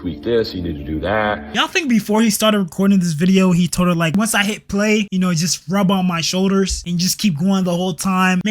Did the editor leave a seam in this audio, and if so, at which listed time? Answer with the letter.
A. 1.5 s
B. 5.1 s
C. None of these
A